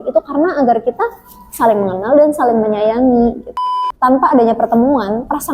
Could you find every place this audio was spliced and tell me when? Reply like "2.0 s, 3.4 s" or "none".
3.7 s